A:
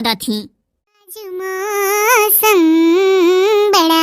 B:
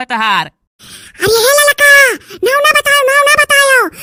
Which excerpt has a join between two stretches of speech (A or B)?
A